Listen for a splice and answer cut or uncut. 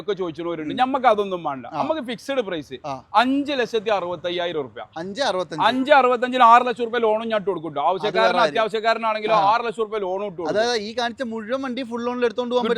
uncut